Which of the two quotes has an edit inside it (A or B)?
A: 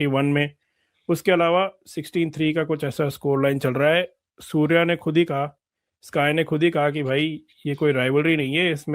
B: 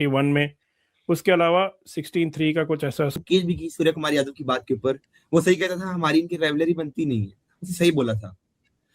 B